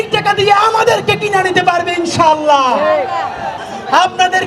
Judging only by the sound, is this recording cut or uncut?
cut